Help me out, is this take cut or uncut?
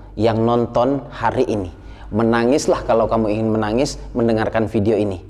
uncut